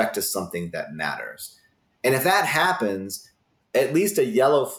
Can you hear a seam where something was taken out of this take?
no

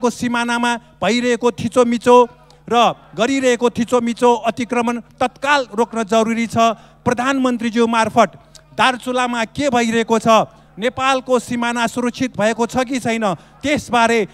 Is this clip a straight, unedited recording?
yes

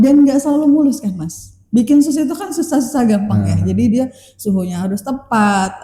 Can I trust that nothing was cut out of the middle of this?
yes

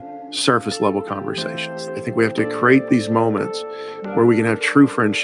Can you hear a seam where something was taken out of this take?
yes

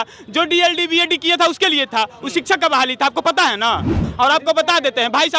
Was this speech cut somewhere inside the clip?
yes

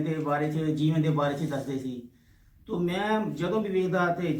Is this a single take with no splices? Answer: yes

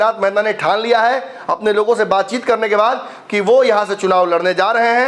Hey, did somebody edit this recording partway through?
no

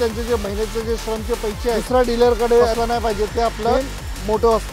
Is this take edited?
yes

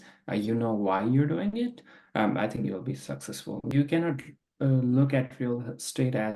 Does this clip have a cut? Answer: yes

